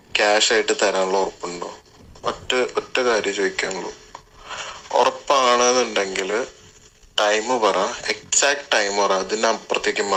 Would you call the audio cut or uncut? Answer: uncut